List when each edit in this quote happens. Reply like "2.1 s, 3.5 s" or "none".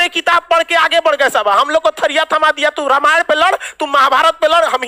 none